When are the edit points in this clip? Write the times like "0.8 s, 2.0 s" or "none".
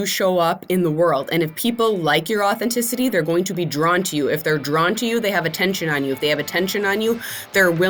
none